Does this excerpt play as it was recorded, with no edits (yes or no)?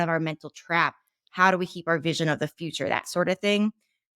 no